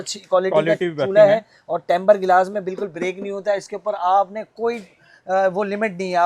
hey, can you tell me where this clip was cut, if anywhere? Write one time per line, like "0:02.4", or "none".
none